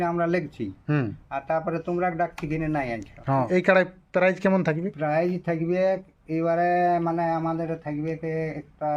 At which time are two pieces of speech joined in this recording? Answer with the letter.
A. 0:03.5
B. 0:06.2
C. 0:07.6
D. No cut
A